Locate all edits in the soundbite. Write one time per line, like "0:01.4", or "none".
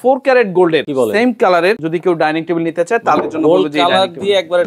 0:00.9
0:01.8